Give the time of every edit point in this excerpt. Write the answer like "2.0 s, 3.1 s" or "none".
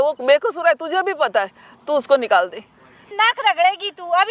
3.1 s